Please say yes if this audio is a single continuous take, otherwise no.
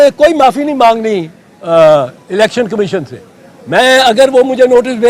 yes